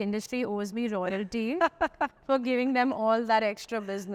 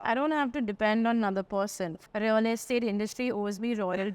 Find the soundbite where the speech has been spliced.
second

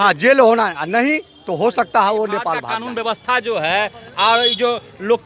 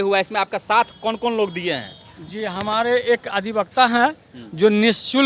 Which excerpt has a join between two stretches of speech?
first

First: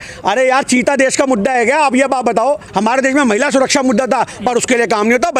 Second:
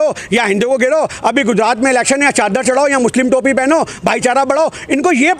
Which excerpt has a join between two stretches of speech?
first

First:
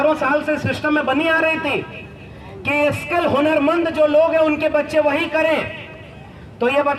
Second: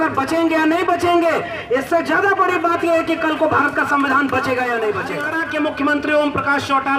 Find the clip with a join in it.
second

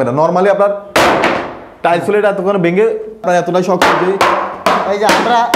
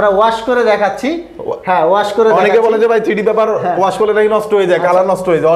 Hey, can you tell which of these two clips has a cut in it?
first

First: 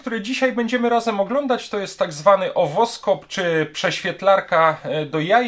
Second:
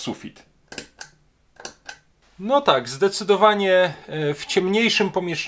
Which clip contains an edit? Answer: second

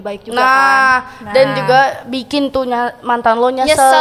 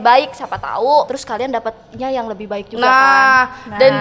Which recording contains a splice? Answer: second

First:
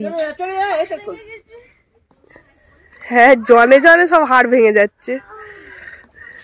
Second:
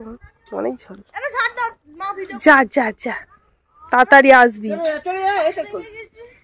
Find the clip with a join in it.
second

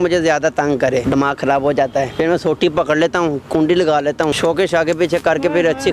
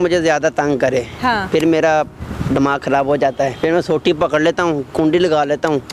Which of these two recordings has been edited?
first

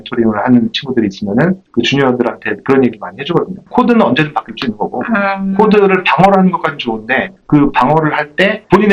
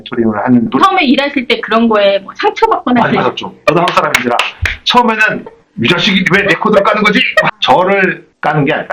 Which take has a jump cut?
second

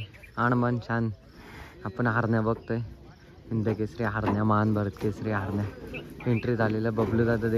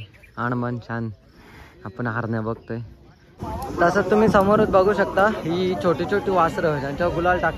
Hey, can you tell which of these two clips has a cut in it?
second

